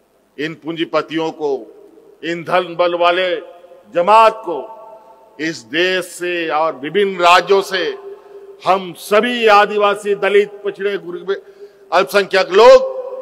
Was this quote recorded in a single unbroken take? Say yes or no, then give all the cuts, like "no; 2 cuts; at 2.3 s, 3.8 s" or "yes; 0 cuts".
yes; 0 cuts